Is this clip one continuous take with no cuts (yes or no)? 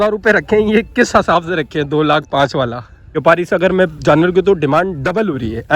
no